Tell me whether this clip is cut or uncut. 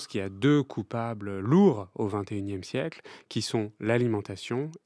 uncut